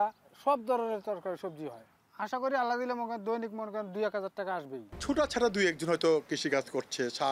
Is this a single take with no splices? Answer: no; 1 cut; at 4.9 s

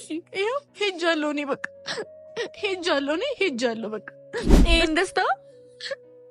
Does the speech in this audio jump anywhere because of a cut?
yes; 1 cut; at 4.5 s

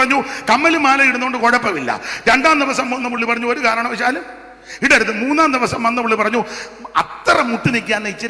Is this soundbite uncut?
yes; 0 cuts

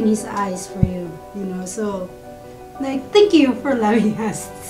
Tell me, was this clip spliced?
no; 0 cuts

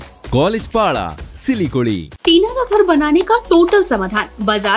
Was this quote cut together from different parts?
yes; 1 cut; at 2.1 s

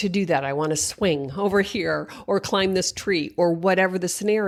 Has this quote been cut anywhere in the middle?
no; 0 cuts

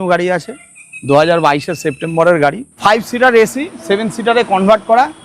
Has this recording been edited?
yes; 1 cut; at 2.7 s

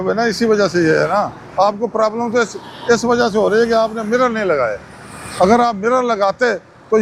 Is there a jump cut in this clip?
no; 0 cuts

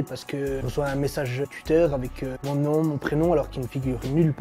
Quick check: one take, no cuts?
yes; 0 cuts

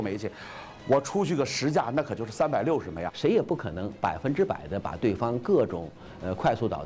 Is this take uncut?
no; 1 cut; at 3.0 s

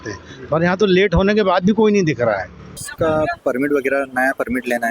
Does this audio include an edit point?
yes; 1 cut; at 2.8 s

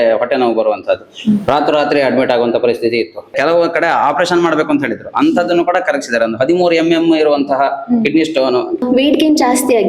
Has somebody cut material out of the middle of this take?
yes; 2 cuts; at 3.3 s, 8.8 s

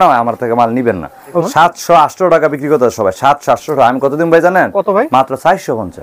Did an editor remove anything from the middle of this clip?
yes; 1 cut; at 1.5 s

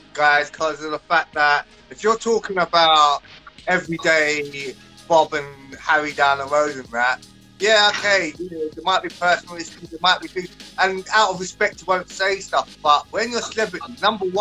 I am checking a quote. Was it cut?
no; 0 cuts

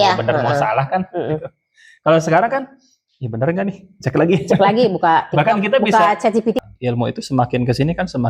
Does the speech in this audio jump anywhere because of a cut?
yes; 1 cut; at 6.6 s

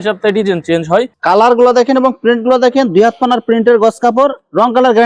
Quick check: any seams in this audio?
yes; 1 cut; at 1.1 s

